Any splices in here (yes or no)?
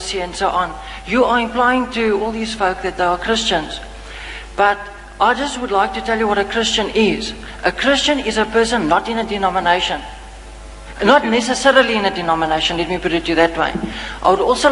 no